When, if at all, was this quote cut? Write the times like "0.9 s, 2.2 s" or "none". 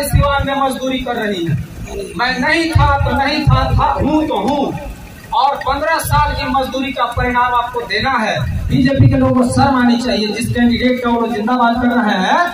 8.6 s

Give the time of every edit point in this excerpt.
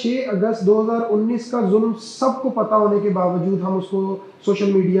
none

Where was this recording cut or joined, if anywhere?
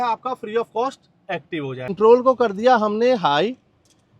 1.9 s

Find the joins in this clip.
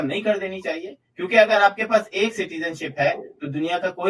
none

